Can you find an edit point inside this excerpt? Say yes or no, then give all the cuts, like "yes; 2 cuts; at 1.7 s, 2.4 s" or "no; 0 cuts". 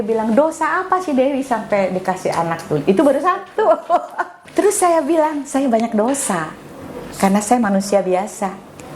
yes; 1 cut; at 4.4 s